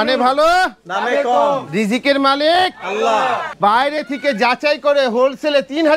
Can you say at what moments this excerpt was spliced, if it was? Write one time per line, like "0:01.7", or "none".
0:03.4